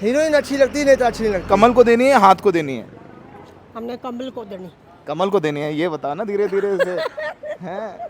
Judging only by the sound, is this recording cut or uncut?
cut